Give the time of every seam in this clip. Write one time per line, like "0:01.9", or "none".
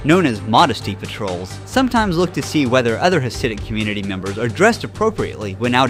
none